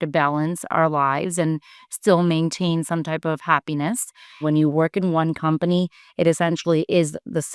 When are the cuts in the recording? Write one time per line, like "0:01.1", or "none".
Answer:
0:04.4